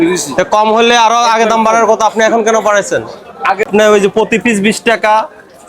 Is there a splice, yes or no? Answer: yes